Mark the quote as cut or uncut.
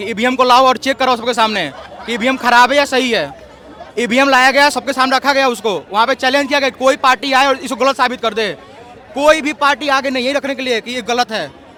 uncut